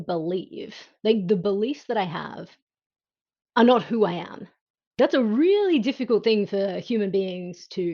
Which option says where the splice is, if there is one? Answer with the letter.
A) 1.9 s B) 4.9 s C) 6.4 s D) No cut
B